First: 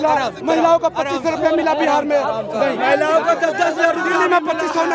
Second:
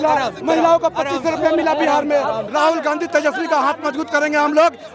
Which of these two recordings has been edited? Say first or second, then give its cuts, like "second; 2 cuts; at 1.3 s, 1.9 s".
second; 1 cut; at 2.4 s